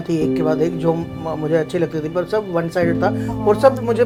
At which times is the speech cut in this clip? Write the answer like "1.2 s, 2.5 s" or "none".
none